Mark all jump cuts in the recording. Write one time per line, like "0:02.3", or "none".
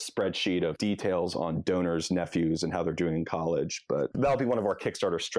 0:00.7
0:04.1